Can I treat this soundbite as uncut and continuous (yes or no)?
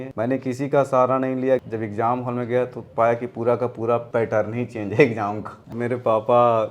no